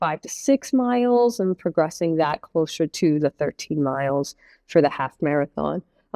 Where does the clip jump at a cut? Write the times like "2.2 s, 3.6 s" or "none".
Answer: none